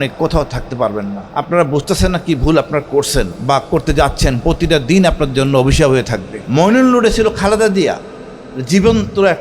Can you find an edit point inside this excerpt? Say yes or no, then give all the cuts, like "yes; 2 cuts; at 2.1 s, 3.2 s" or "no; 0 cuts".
yes; 3 cuts; at 1.2 s, 3.3 s, 6.3 s